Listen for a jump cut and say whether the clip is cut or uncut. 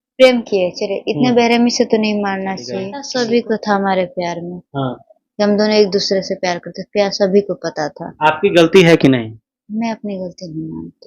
cut